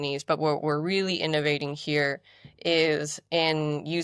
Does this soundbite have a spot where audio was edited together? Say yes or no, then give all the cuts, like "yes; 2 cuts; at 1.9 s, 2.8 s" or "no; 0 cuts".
no; 0 cuts